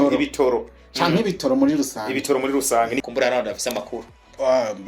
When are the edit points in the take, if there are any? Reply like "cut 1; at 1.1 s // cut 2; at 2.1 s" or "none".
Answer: cut 1; at 3.0 s